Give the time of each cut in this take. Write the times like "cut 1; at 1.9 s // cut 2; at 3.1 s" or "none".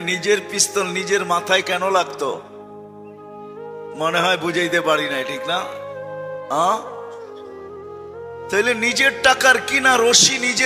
cut 1; at 7.0 s // cut 2; at 8.5 s